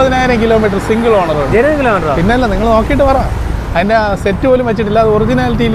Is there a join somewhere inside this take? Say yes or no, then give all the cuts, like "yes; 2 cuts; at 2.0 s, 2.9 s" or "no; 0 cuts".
no; 0 cuts